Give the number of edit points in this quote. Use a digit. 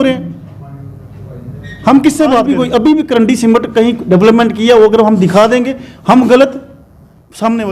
1